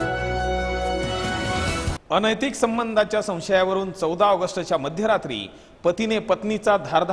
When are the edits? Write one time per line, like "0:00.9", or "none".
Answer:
0:02.0